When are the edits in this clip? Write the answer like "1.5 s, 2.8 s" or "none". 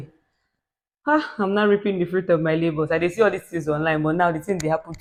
none